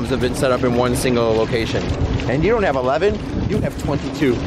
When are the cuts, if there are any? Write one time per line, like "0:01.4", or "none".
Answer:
none